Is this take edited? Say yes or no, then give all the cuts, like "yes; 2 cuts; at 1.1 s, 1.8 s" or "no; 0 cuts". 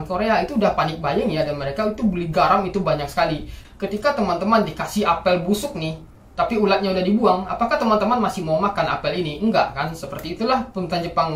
yes; 1 cut; at 3.6 s